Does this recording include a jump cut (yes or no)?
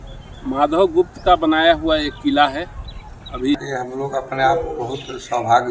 yes